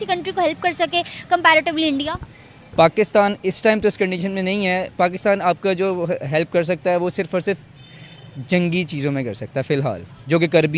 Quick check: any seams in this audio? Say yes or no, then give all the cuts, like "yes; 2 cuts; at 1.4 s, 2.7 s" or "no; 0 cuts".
no; 0 cuts